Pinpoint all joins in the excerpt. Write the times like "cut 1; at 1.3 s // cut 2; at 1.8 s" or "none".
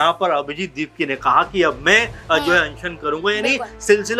none